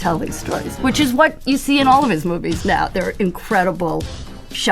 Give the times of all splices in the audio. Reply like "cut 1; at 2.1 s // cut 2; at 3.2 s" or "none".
none

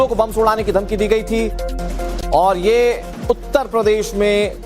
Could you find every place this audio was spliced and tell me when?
cut 1; at 3.1 s

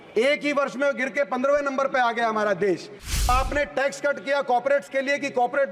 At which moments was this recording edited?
cut 1; at 3.3 s

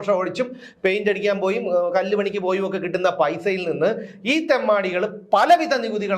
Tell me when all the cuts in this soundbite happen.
none

